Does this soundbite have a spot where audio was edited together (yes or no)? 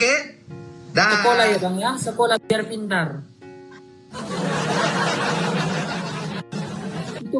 no